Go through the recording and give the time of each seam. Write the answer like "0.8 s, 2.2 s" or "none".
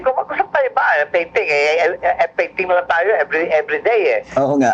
none